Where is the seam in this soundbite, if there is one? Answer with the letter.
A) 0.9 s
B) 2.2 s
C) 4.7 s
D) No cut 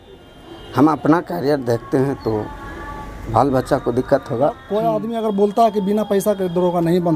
C